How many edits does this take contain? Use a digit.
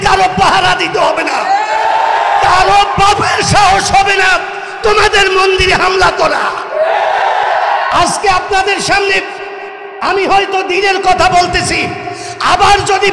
1